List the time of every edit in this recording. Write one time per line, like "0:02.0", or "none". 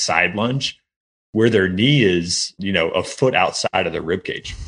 0:02.6
0:03.7